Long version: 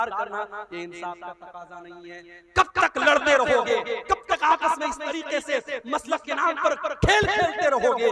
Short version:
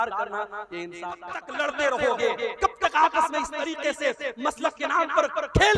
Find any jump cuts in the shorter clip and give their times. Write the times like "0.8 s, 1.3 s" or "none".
1.5 s